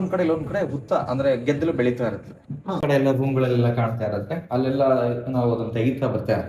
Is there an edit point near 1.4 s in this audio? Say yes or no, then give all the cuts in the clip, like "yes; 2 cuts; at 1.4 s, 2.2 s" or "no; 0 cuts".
no; 1 cut; at 2.8 s